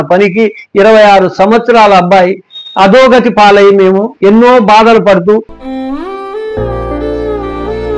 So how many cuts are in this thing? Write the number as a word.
one